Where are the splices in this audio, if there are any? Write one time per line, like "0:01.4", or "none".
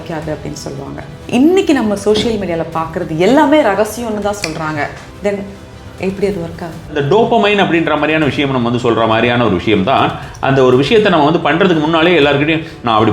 0:01.1
0:05.0
0:07.0